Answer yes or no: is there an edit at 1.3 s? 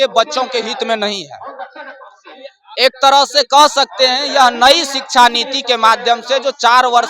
no